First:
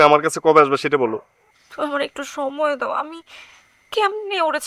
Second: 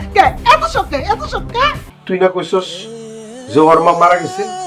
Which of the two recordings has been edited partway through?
second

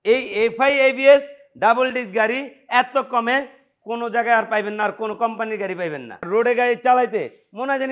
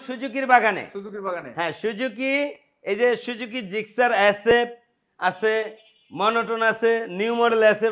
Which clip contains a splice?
first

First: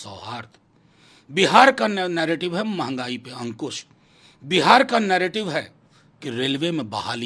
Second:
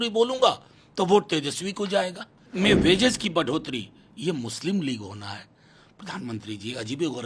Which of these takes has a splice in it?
second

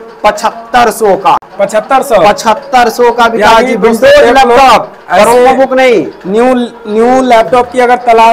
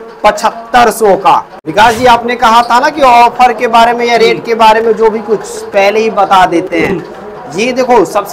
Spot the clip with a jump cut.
second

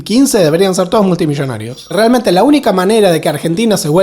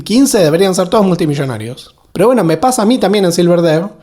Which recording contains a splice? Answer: first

